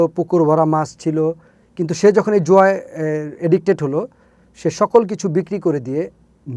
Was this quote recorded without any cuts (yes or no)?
yes